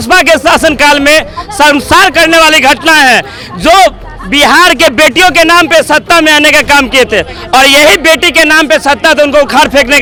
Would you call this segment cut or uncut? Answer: uncut